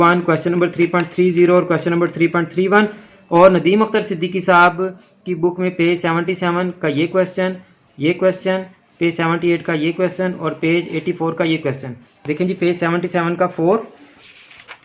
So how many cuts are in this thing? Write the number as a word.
zero